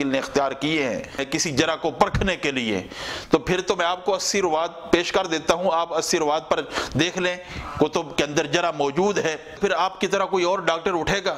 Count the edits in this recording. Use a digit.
1